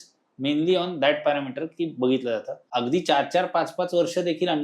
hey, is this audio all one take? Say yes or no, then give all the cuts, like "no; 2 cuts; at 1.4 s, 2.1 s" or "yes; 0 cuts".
no; 1 cut; at 2.6 s